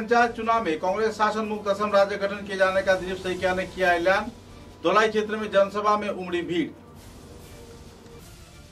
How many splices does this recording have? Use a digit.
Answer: 0